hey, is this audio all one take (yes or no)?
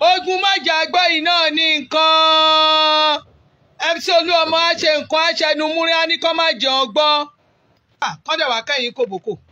no